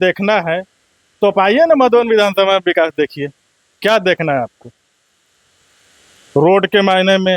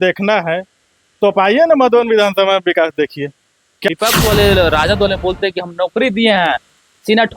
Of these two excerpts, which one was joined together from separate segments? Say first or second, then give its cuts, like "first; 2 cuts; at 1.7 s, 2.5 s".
second; 1 cut; at 4.0 s